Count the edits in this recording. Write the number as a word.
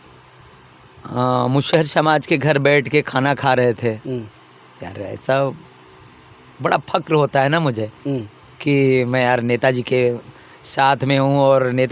zero